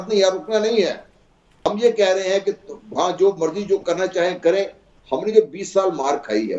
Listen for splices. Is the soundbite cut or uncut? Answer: cut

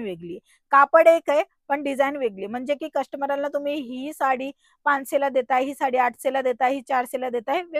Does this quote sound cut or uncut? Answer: uncut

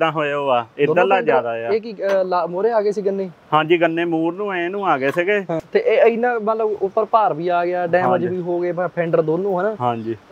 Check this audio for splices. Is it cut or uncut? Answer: cut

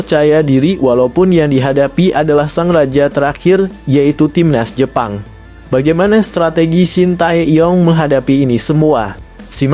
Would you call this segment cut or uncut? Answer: uncut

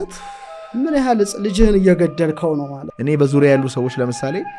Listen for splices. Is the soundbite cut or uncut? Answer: cut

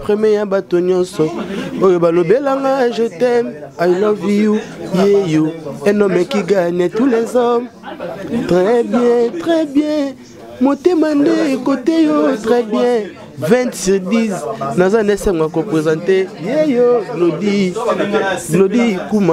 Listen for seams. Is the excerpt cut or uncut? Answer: uncut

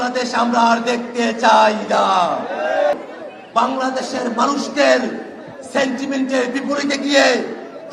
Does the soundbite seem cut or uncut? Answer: cut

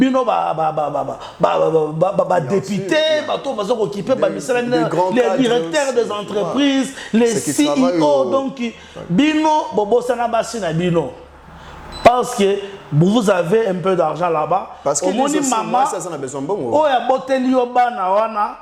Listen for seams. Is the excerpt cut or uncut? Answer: uncut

